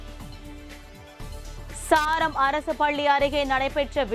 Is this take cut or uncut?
cut